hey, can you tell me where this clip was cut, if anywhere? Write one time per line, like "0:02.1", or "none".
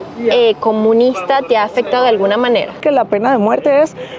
0:02.8

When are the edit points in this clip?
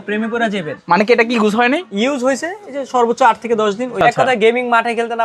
0:04.0

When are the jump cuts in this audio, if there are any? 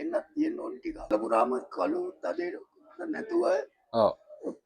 0:01.1

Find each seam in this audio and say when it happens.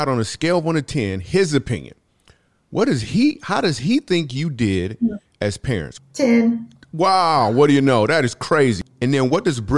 0:05.9
0:08.8

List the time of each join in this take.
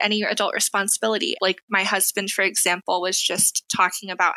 0:01.3

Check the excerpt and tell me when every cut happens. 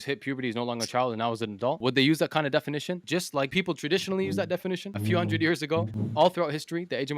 0:01.8
0:03.5
0:04.9
0:06.0

